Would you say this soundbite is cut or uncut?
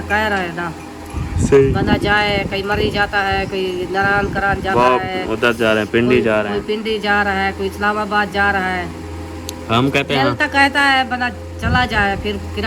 uncut